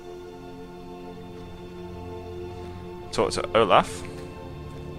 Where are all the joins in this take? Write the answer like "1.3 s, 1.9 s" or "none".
none